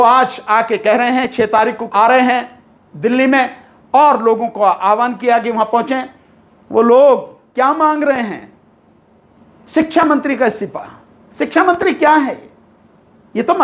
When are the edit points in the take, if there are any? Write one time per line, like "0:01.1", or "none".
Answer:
0:01.5